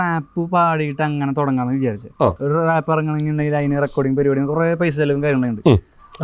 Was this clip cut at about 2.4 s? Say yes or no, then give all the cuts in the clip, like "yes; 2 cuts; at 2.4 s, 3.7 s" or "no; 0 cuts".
yes; 1 cut; at 2.4 s